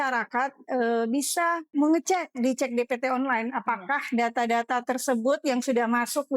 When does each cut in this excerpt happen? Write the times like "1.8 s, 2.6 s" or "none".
1.7 s